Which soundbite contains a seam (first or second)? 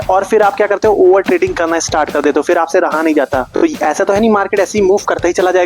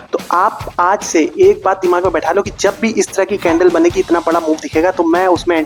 first